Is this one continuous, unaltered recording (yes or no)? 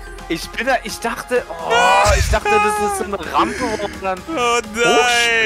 yes